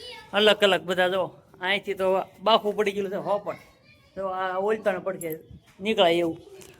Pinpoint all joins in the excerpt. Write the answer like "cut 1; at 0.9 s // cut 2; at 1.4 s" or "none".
none